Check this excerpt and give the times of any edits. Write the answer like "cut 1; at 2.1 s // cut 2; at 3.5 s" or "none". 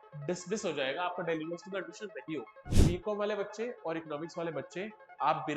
cut 1; at 2.8 s